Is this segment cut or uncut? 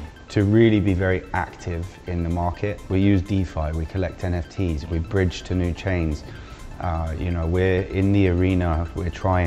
cut